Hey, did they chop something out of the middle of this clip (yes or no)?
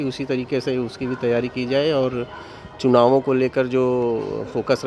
no